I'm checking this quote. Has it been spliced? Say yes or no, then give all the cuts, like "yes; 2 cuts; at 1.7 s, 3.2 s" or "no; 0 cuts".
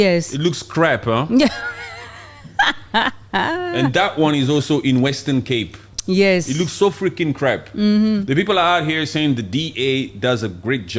no; 0 cuts